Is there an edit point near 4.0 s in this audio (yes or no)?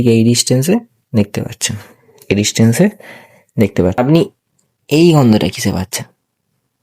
yes